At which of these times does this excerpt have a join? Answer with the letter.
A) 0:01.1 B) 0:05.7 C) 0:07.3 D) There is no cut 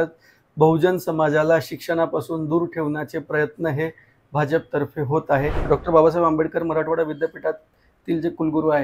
B